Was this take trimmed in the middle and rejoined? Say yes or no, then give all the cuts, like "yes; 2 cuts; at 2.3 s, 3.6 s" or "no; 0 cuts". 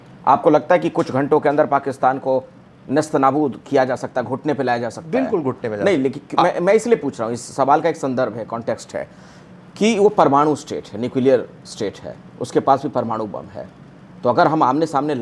no; 0 cuts